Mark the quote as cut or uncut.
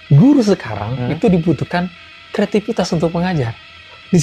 uncut